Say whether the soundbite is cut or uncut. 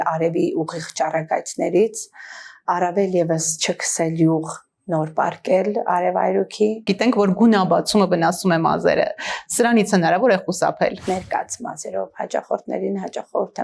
cut